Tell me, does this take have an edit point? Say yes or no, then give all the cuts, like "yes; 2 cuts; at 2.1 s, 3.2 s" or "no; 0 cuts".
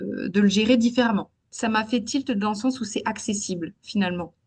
yes; 1 cut; at 1.4 s